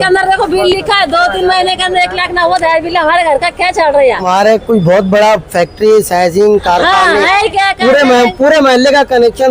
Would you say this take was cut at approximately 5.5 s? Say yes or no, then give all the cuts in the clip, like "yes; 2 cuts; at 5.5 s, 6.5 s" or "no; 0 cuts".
no; 1 cut; at 4.2 s